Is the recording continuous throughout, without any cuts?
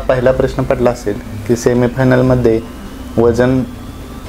yes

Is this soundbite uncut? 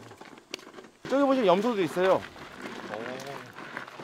no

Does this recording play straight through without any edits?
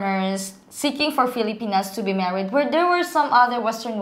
yes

